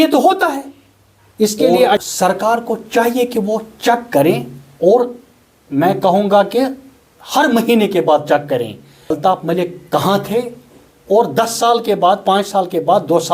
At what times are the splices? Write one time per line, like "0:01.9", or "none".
0:02.0
0:09.2